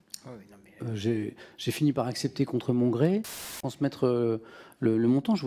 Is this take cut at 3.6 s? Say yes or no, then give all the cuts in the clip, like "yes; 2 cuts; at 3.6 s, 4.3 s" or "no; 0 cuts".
yes; 1 cut; at 3.6 s